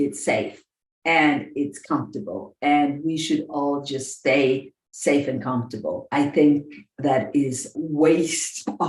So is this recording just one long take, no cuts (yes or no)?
no